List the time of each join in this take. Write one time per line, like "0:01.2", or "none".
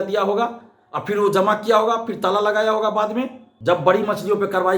0:03.4